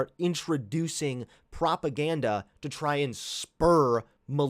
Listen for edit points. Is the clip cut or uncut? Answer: uncut